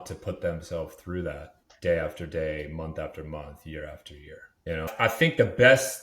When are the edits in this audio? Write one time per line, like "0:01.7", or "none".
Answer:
0:04.9

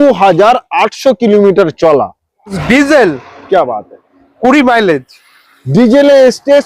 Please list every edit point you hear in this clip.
0:02.6

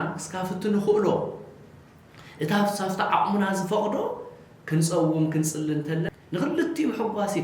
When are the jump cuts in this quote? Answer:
0:06.1

